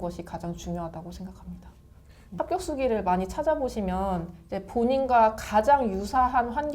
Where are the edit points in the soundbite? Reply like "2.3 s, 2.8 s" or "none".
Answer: 2.1 s